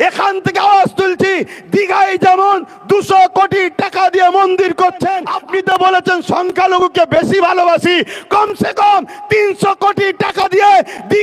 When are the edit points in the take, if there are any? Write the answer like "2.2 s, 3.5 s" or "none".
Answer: 5.3 s